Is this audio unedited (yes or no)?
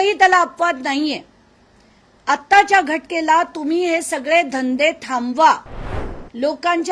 yes